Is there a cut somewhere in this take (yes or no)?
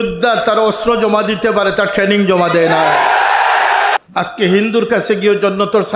yes